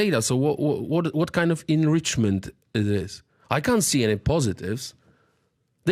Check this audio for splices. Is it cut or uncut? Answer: uncut